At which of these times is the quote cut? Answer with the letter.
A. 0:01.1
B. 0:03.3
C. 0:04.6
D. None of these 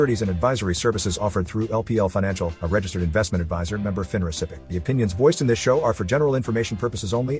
C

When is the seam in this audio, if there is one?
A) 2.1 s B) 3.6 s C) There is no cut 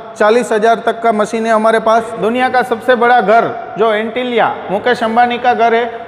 A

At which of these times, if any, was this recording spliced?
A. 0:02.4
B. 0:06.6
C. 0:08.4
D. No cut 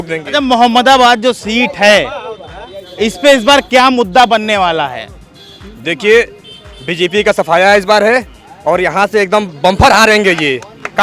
D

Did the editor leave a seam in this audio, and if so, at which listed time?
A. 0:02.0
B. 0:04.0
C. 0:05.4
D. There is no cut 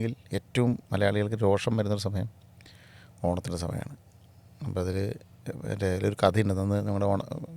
D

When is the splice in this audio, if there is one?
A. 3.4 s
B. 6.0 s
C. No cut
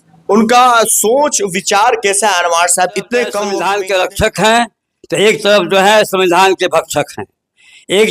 A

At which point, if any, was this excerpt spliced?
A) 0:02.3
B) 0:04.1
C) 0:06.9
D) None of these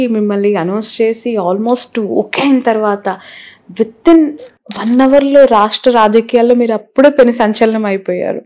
D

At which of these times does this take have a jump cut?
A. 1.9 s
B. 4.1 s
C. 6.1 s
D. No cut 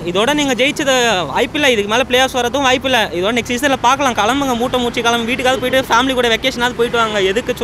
D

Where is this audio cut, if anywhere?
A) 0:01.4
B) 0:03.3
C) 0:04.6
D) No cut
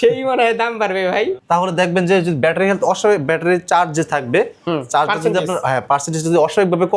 A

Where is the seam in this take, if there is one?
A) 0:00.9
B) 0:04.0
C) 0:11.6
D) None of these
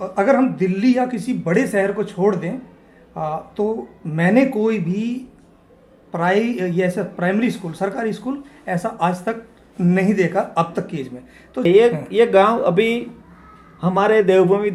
C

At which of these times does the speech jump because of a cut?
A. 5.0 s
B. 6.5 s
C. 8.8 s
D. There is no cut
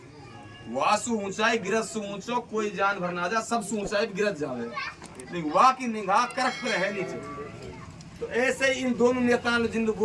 D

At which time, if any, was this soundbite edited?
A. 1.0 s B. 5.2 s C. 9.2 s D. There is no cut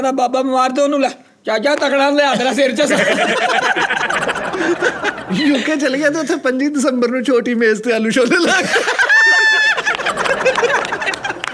B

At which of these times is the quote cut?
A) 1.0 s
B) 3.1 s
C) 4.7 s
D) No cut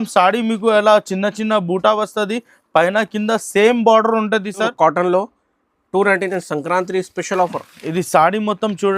C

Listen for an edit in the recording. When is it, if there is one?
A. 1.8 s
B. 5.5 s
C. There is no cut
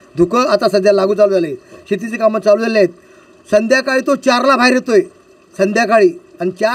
C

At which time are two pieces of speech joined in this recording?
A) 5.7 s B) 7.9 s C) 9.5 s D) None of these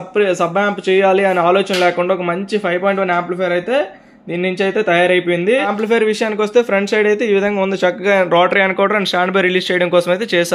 A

